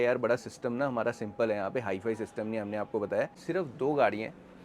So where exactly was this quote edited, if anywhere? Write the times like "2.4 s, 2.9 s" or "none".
3.4 s